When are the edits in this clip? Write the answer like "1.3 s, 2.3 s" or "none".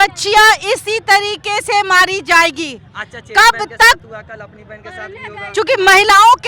none

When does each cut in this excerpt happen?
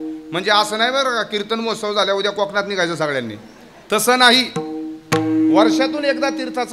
none

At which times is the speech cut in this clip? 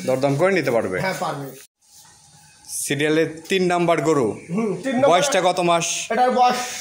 1.6 s

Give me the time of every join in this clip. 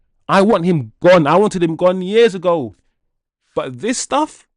none

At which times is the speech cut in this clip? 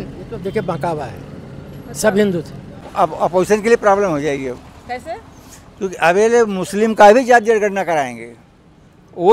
2.8 s

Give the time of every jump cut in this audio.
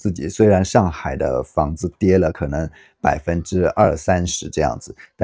none

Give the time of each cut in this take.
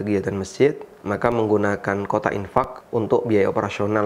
0.9 s, 2.8 s

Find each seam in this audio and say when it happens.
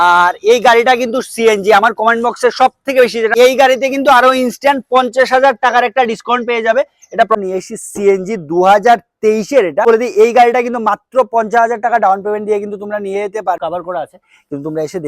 3.4 s, 7.3 s, 9.8 s, 13.6 s

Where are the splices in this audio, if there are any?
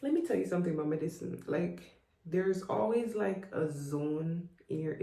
none

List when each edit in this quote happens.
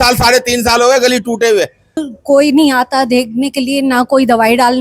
2.1 s

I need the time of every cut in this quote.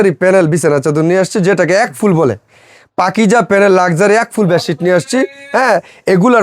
none

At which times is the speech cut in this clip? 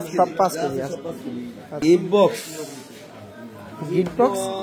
1.8 s

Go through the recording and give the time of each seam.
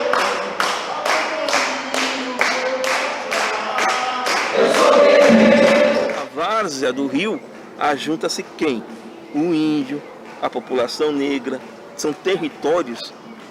none

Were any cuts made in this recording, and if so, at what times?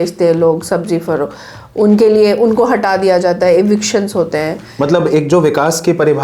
4.6 s

